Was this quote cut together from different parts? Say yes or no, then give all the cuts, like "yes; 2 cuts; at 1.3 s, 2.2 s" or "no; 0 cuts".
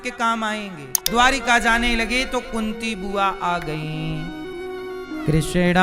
yes; 1 cut; at 1.0 s